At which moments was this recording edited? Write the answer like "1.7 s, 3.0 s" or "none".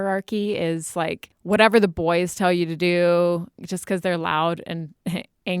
1.3 s